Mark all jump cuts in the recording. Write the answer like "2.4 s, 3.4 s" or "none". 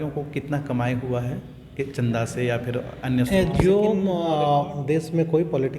4.1 s